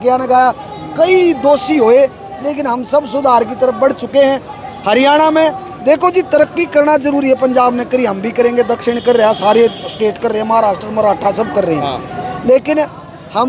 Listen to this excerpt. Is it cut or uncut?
uncut